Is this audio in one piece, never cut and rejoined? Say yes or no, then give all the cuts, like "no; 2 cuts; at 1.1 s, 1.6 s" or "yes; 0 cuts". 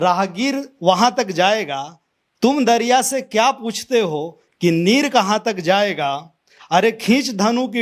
yes; 0 cuts